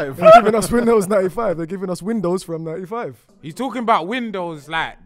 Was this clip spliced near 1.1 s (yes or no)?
no